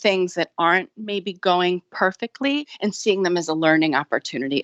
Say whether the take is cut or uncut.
uncut